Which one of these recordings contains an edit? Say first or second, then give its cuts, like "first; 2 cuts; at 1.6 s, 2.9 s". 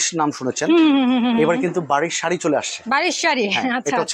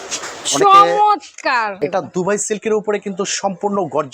second; 1 cut; at 1.7 s